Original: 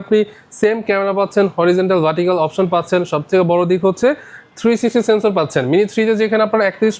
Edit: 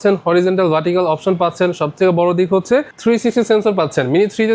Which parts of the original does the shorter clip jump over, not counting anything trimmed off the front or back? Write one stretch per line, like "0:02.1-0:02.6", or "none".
0:04.2-0:04.5